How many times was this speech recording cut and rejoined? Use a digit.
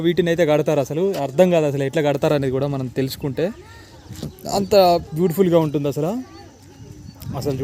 0